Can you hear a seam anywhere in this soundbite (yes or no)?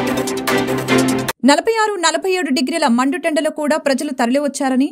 yes